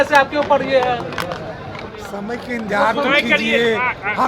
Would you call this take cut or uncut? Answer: uncut